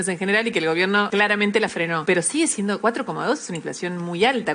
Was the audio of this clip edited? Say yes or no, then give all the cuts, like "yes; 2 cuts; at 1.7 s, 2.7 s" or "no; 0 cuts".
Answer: yes; 3 cuts; at 1.1 s, 2.0 s, 2.8 s